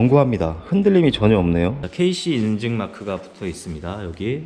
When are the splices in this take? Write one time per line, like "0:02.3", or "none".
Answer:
0:01.8

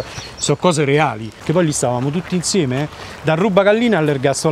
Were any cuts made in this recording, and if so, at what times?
0:01.3

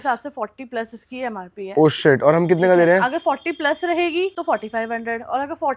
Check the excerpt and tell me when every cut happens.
0:04.4

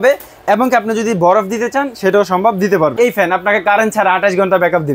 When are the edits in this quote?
0:02.9

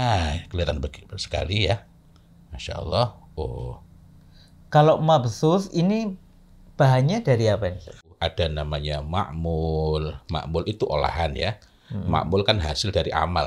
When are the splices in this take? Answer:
0:08.1

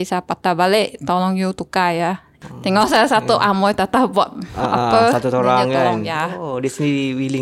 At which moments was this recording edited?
0:02.3

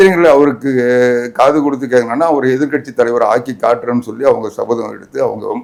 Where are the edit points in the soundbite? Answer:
none

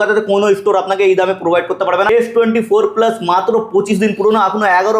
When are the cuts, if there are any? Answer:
0:02.1

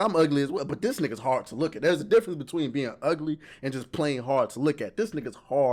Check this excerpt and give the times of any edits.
none

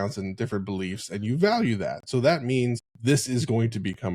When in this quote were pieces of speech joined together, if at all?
0:02.9

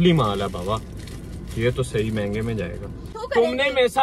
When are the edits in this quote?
0:03.1

